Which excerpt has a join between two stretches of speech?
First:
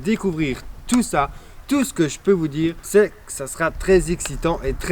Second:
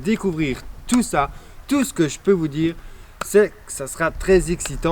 first; 1 cut; at 2.8 s

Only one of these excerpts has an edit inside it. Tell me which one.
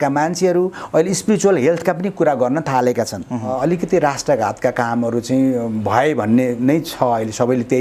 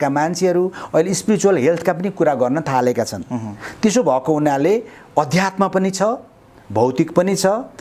first; 1 cut; at 3.5 s

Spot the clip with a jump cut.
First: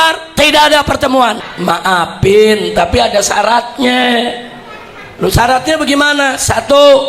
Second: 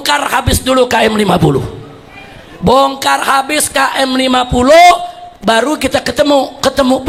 first; 1 cut; at 1.4 s

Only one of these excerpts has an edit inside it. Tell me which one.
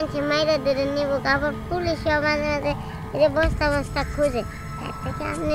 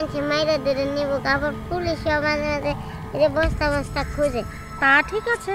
second; 1 cut; at 4.6 s

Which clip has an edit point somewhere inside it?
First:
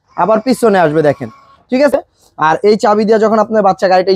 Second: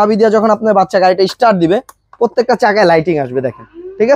first; 1 cut; at 1.9 s

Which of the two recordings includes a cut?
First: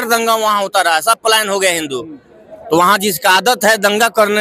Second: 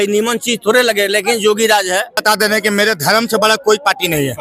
second; 1 cut; at 2.2 s

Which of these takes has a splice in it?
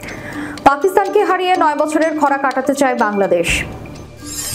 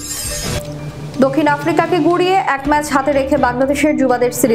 second; 1 cut; at 1.2 s

